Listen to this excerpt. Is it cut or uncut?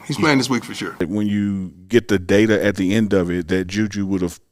cut